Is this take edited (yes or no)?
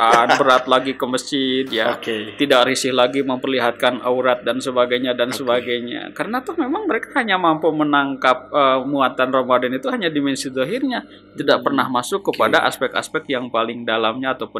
no